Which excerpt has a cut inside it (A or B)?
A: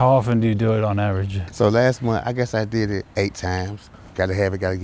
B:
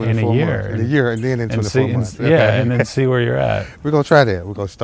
A